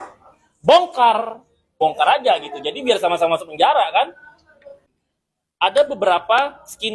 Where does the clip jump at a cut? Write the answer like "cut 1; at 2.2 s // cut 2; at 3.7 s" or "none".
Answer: cut 1; at 1.8 s // cut 2; at 4.6 s